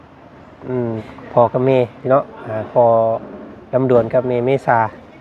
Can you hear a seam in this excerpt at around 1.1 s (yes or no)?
yes